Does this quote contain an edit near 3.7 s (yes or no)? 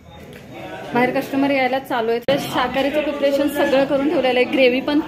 no